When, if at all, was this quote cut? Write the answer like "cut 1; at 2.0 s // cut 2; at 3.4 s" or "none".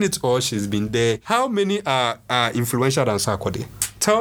cut 1; at 1.2 s